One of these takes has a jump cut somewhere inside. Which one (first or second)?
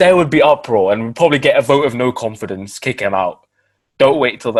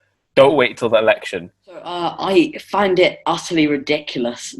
second